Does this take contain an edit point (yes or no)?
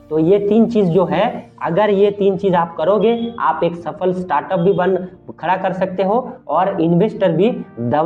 no